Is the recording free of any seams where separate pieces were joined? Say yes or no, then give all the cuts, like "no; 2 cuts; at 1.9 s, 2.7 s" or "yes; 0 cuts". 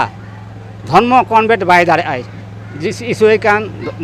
yes; 0 cuts